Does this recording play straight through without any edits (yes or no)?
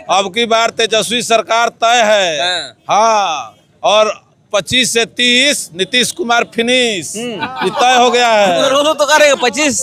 yes